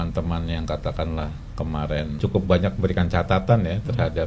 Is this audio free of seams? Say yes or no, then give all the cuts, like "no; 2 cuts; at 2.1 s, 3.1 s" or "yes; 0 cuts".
no; 1 cut; at 2.2 s